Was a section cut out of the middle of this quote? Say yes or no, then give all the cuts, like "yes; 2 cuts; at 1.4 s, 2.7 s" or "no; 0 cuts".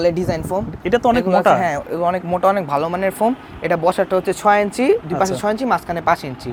no; 0 cuts